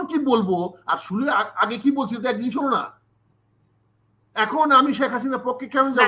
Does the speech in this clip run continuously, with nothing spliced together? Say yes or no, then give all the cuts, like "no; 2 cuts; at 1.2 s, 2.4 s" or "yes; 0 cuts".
yes; 0 cuts